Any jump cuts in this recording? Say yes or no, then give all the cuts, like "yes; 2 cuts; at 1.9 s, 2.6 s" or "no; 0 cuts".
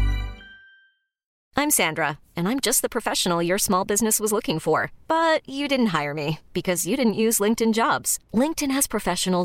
yes; 1 cut; at 1.3 s